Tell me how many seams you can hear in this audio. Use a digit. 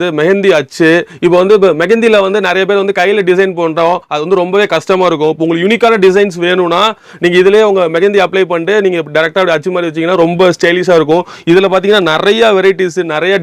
0